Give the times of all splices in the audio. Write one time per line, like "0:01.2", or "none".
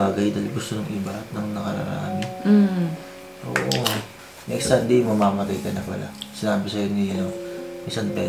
0:04.2